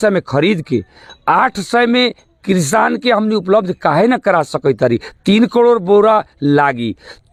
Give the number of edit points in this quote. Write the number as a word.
zero